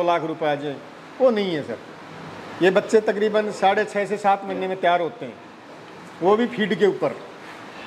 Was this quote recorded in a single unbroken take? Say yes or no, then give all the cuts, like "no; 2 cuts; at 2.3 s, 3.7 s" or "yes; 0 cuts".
yes; 0 cuts